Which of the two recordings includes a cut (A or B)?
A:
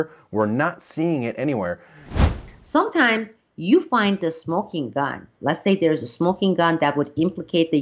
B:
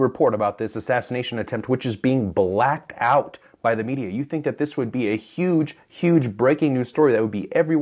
A